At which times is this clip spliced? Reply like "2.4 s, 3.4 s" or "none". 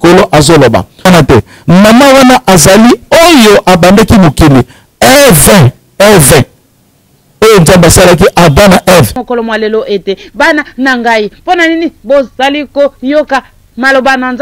1.1 s, 9.2 s